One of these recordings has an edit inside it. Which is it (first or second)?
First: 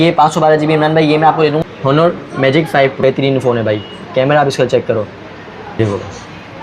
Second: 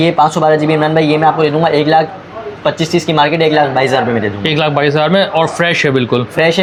first